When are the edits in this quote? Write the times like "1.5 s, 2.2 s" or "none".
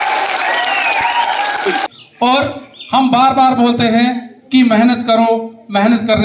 1.9 s

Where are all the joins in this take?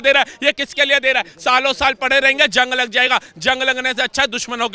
none

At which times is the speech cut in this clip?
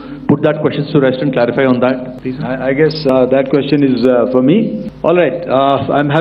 2.1 s, 4.9 s

